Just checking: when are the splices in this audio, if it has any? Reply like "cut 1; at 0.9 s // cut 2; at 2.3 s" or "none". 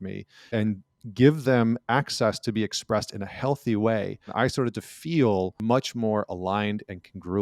cut 1; at 4.3 s // cut 2; at 5.5 s

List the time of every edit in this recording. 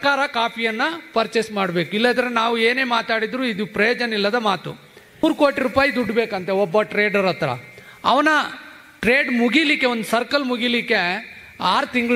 cut 1; at 5.2 s

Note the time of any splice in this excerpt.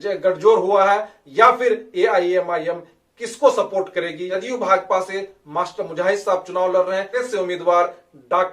cut 1; at 4.4 s // cut 2; at 7.3 s

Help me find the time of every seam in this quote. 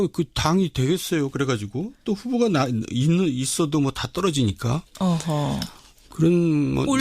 cut 1; at 4.6 s

